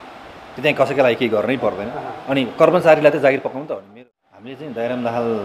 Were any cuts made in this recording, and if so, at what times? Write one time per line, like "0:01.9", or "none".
0:03.8